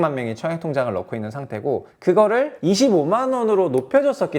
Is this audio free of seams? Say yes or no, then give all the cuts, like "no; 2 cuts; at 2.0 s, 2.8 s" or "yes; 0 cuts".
no; 2 cuts; at 1.9 s, 2.5 s